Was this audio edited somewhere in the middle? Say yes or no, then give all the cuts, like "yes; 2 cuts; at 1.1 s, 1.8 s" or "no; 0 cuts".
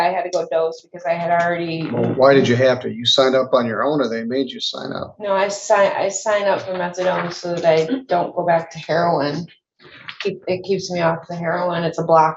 no; 0 cuts